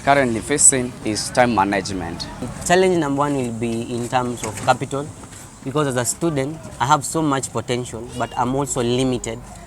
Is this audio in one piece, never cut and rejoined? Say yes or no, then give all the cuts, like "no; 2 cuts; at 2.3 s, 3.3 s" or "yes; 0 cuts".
no; 2 cuts; at 1.2 s, 2.5 s